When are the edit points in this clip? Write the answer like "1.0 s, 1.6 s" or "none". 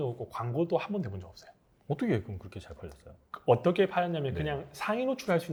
none

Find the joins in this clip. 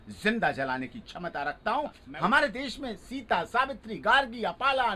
2.0 s

